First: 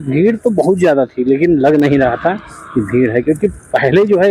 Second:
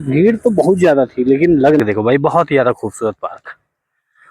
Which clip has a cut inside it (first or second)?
second